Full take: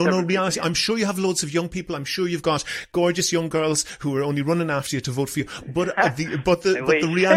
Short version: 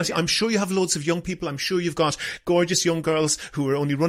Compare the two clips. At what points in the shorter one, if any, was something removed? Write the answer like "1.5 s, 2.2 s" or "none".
none